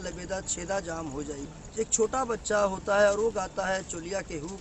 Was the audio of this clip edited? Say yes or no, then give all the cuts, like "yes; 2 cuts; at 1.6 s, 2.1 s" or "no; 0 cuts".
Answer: yes; 1 cut; at 1.5 s